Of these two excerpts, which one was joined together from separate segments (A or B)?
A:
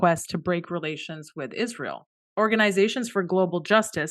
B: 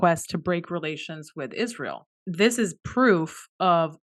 B